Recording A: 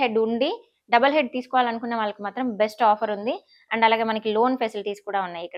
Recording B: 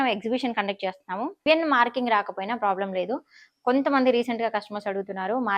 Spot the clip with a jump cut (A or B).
B